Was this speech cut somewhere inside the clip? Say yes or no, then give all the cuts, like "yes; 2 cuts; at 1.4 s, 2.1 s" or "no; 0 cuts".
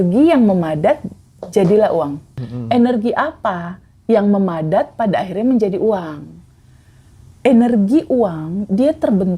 yes; 1 cut; at 2.3 s